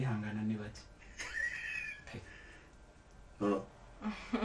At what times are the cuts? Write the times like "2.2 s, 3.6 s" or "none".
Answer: none